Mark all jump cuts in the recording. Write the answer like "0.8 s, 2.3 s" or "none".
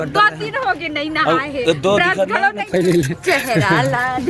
2.7 s